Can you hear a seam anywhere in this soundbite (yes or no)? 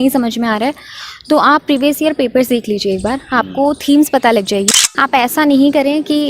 yes